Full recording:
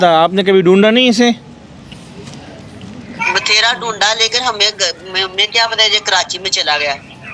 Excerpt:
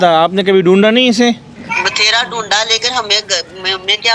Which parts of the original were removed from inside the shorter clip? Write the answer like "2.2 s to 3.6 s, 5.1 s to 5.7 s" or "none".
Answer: 1.5 s to 3.0 s